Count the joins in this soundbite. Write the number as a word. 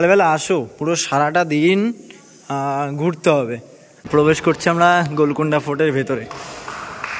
one